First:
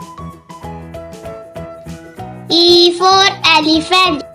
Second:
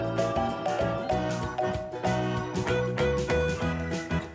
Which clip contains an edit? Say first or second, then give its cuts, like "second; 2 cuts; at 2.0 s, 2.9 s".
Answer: first; 1 cut; at 2.4 s